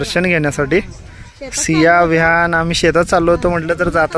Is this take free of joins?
yes; 0 cuts

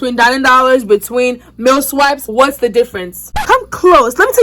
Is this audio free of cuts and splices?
no; 2 cuts; at 2.3 s, 3.4 s

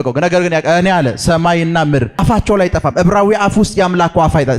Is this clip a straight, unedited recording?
no; 1 cut; at 2.2 s

